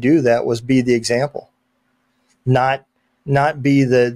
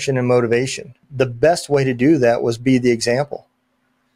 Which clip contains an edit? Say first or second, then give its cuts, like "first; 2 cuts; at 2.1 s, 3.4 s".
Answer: second; 1 cut; at 1.0 s